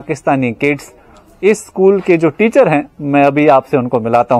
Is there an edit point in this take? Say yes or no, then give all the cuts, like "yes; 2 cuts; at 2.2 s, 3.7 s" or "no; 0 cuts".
no; 0 cuts